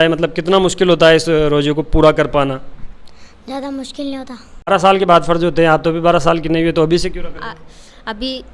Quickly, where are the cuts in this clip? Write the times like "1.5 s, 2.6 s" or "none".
4.7 s